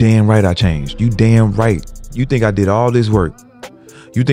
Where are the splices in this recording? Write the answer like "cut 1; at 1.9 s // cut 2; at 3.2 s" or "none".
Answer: cut 1; at 2.2 s